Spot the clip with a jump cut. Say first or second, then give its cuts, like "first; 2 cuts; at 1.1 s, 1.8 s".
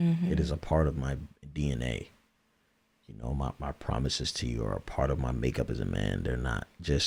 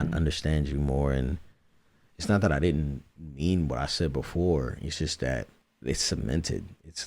second; 1 cut; at 5.6 s